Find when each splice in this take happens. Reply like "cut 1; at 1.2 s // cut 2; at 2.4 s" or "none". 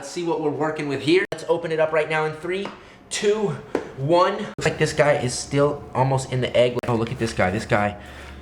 cut 1; at 1.4 s // cut 2; at 4.7 s // cut 3; at 6.8 s